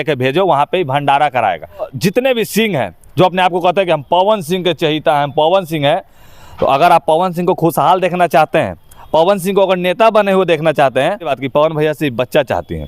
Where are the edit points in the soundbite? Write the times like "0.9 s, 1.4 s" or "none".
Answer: 1.9 s, 11.4 s